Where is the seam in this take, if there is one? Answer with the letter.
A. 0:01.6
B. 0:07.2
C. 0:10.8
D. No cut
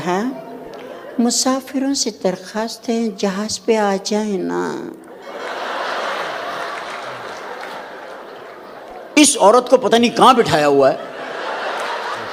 D